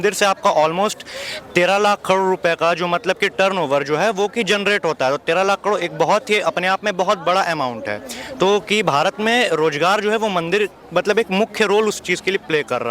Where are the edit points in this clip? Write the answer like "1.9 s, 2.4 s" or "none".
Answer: none